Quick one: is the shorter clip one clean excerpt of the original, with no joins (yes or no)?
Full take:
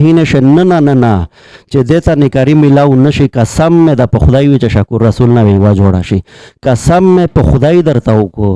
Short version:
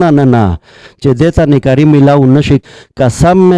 no